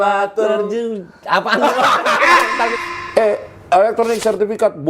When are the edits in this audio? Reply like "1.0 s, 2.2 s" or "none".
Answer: 2.7 s